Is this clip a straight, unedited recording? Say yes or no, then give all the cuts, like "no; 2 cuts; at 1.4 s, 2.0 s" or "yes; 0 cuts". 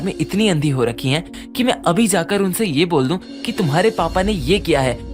yes; 0 cuts